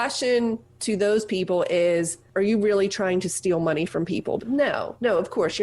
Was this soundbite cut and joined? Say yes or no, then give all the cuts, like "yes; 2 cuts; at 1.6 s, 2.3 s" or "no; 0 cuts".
yes; 2 cuts; at 2.2 s, 4.4 s